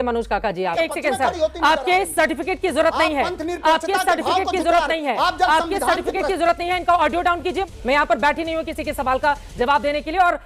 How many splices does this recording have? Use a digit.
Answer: 2